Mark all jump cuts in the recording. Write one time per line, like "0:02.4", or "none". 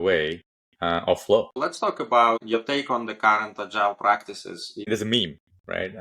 0:01.6
0:02.4
0:04.9